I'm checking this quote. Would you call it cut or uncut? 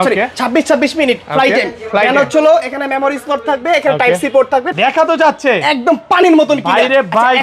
cut